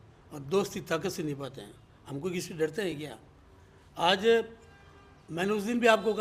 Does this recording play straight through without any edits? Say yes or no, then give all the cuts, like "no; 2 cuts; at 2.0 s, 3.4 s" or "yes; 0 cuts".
yes; 0 cuts